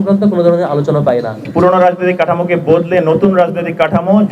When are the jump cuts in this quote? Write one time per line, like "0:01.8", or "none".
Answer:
0:01.4